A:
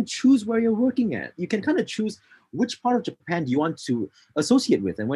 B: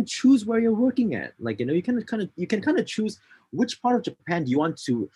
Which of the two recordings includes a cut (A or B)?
A